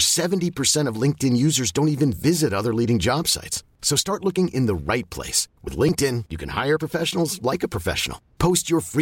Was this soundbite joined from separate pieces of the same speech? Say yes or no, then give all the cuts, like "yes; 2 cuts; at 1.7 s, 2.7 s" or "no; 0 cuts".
no; 0 cuts